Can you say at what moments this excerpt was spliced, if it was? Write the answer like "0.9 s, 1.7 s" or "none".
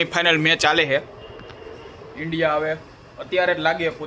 none

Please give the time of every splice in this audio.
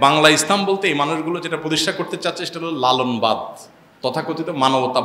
none

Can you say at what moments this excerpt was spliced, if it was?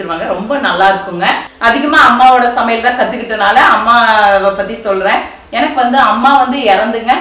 1.5 s

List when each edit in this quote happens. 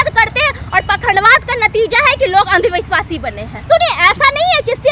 3.7 s

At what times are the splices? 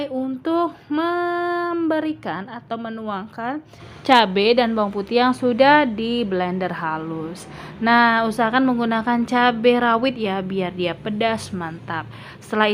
none

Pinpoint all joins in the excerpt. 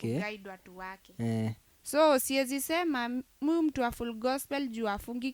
1.7 s

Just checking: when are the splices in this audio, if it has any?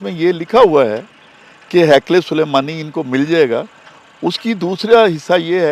none

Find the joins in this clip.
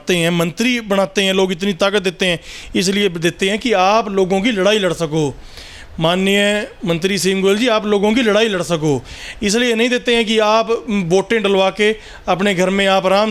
none

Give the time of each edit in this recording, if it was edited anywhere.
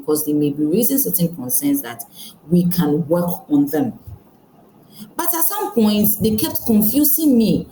none

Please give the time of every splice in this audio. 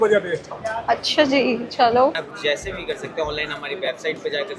2.2 s

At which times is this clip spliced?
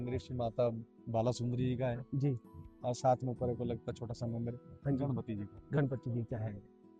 none

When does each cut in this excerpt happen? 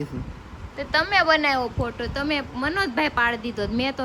none

